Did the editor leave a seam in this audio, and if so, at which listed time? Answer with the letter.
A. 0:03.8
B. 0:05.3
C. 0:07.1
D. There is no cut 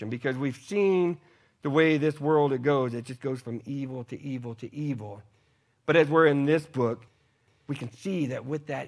C